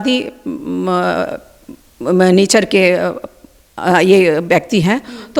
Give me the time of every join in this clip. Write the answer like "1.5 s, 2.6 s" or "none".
none